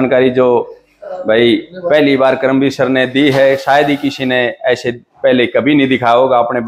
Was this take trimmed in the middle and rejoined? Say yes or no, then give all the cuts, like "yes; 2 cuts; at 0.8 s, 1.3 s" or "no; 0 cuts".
no; 0 cuts